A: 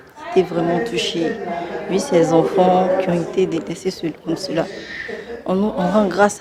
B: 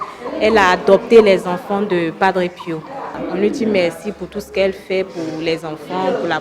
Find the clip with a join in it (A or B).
B